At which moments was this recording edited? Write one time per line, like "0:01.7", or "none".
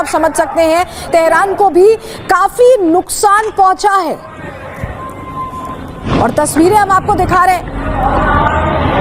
0:01.1